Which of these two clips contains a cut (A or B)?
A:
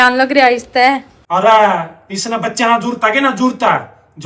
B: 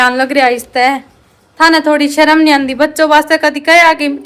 A